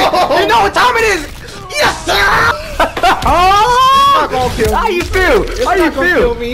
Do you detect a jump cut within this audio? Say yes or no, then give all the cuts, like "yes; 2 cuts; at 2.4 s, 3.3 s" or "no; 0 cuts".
yes; 1 cut; at 2.5 s